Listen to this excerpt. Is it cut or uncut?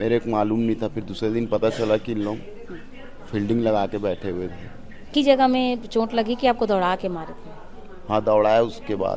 cut